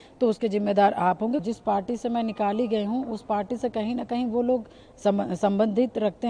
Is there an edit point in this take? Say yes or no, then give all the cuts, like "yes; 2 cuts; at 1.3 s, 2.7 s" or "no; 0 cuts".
yes; 1 cut; at 1.4 s